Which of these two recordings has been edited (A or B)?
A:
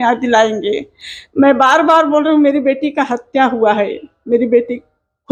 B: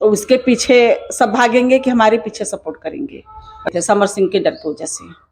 B